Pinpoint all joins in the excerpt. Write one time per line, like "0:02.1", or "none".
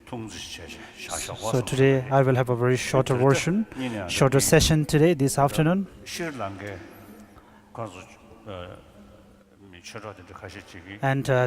0:06.6